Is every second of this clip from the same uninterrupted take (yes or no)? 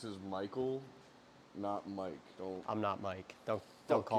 yes